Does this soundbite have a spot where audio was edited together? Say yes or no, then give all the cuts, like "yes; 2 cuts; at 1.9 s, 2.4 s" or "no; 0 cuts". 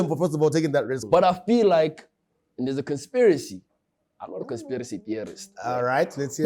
yes; 1 cut; at 1.0 s